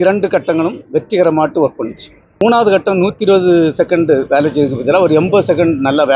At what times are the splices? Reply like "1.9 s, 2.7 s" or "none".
2.4 s